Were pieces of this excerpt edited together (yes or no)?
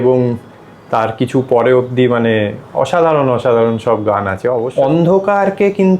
yes